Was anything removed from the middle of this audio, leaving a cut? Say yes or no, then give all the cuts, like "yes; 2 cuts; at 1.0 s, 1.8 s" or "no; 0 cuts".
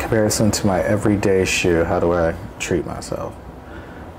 no; 0 cuts